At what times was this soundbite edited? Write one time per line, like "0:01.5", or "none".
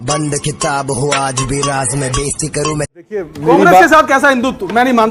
0:03.3